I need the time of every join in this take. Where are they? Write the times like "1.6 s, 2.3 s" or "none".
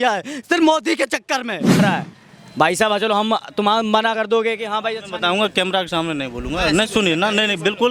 1.8 s